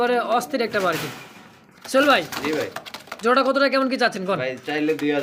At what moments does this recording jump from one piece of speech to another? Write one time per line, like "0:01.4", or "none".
none

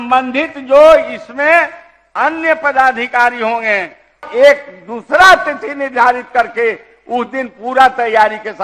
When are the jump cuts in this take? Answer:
0:04.3

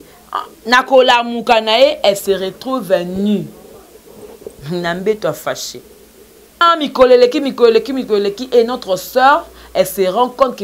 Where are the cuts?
0:06.6

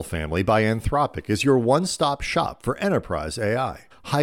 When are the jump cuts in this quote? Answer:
none

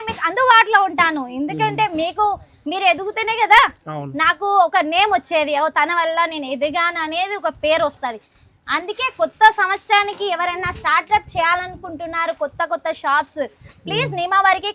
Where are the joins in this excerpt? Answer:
none

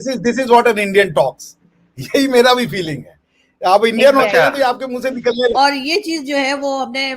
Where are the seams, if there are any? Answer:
0:05.5

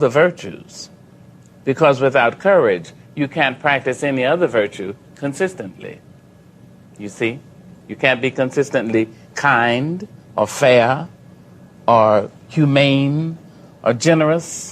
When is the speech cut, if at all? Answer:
none

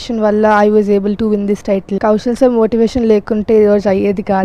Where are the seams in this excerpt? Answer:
0:01.9

